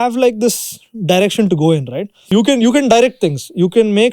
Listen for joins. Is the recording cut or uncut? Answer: cut